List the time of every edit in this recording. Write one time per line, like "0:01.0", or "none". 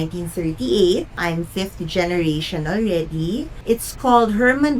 0:01.1
0:03.6

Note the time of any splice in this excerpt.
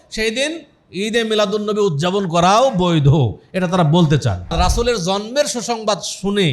0:04.5

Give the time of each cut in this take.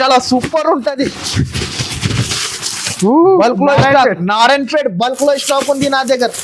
none

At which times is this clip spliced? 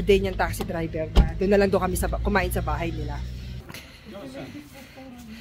0:03.6

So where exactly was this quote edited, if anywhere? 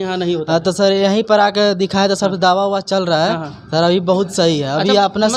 none

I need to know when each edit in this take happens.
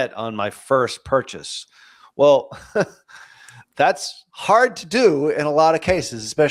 none

